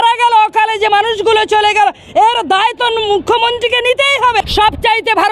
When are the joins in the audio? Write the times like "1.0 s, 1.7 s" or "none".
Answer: 4.4 s